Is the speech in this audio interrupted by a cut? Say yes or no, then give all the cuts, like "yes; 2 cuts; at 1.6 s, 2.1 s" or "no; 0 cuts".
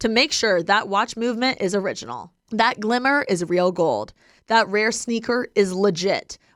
no; 0 cuts